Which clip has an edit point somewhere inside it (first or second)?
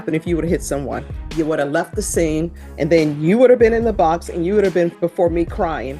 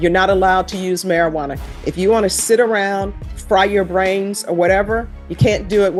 first